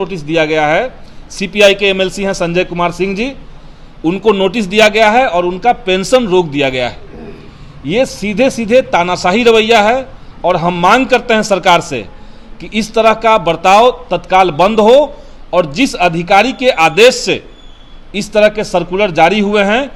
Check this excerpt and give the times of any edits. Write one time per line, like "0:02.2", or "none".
none